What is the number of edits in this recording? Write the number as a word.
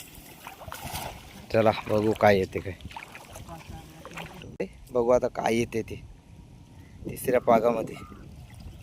one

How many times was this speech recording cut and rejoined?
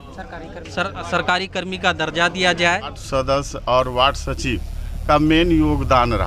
one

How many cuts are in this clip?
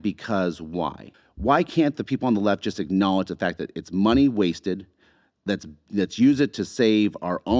one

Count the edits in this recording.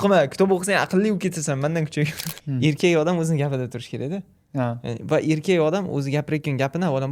one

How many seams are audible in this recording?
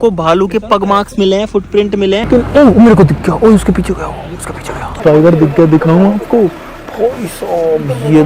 two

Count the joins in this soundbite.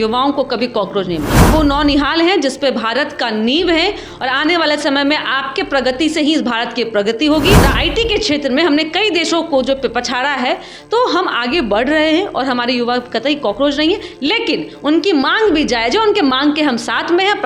two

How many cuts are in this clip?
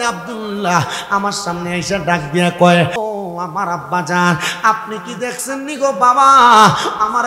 one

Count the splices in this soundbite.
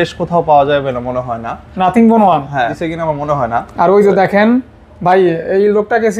one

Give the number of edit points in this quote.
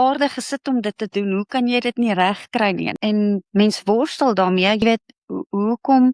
two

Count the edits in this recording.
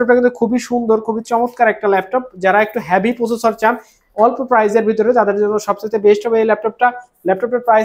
zero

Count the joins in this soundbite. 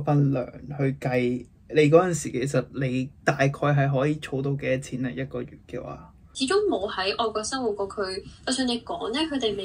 one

